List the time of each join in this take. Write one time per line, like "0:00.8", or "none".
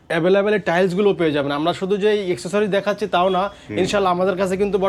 none